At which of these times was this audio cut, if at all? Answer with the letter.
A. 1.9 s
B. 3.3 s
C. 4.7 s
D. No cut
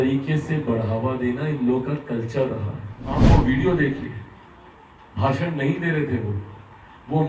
B